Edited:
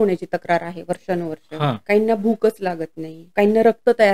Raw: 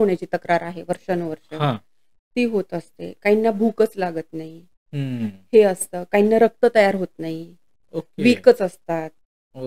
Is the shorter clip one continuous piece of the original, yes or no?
no